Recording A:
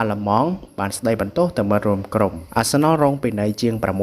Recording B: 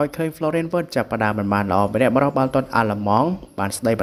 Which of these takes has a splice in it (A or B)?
A